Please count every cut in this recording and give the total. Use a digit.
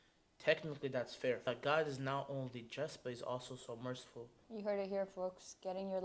2